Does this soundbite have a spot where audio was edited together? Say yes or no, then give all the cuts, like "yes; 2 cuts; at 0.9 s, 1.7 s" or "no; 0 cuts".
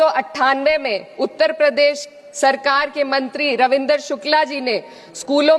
no; 0 cuts